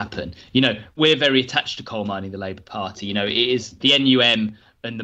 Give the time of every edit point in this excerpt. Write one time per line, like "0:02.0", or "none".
0:00.9
0:03.8